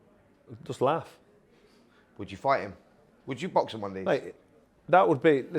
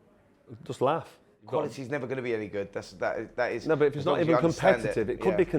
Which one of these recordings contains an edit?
second; 1 cut; at 1.4 s

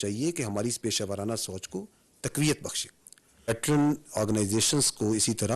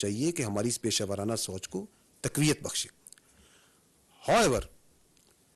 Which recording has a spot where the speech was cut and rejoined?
first; 1 cut; at 3.5 s

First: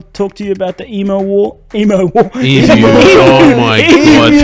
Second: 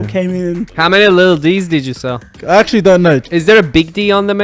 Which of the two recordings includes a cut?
second; 3 cuts; at 0.9 s, 2.3 s, 3.3 s

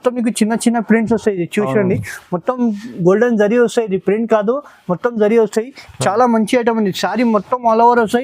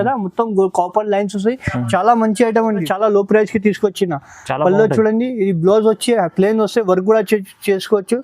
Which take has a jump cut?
second; 1 cut; at 2.9 s

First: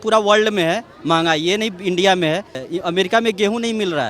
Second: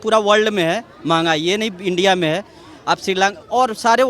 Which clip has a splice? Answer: first; 1 cut; at 2.7 s

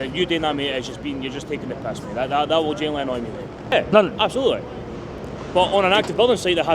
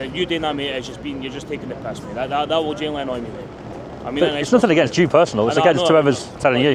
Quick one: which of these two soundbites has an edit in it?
first; 1 cut; at 3.7 s

